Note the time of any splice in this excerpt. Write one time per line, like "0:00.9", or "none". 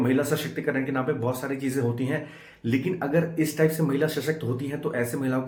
none